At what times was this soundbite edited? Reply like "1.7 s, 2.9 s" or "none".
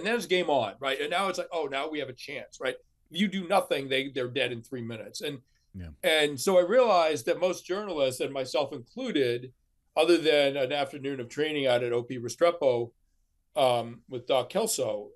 none